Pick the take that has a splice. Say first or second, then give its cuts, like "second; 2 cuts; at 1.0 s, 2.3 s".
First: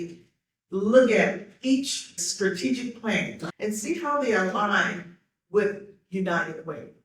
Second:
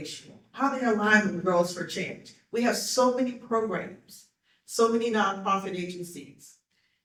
first; 2 cuts; at 2.2 s, 3.4 s